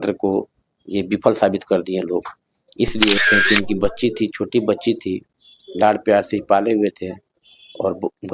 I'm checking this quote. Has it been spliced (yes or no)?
yes